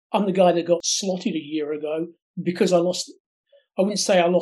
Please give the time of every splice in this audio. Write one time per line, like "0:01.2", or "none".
0:00.9